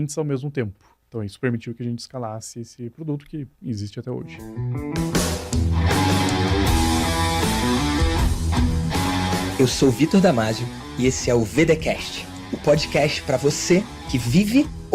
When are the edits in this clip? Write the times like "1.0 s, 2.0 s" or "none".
1.0 s, 4.6 s